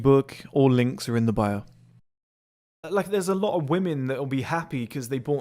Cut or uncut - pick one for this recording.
cut